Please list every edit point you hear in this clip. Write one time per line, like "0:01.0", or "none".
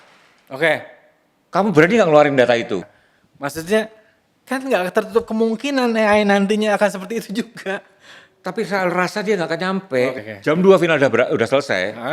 0:02.9
0:10.1

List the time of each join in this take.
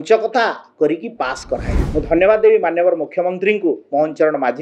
0:01.8

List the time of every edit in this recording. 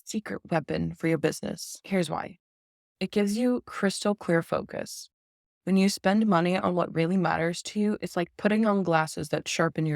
0:01.7

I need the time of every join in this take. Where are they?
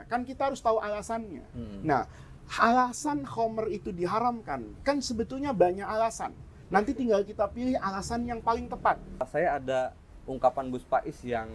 0:09.2

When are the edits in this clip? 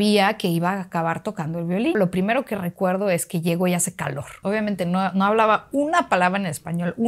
0:01.9
0:04.3

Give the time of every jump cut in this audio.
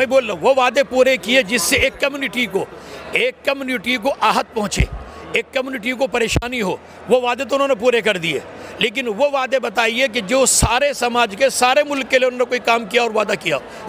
none

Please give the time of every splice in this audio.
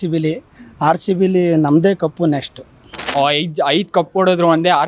0:03.0

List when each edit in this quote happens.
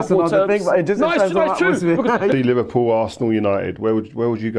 0:02.3

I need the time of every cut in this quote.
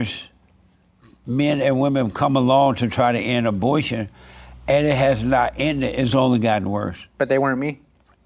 none

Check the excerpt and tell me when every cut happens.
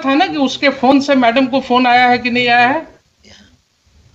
none

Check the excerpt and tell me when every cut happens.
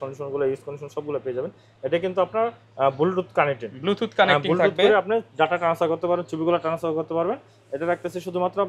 none

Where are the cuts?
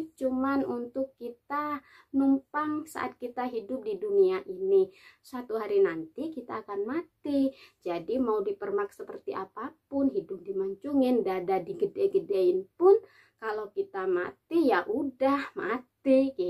none

